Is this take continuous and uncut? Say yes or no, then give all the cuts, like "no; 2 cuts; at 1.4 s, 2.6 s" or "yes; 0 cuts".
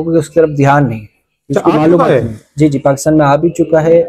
yes; 0 cuts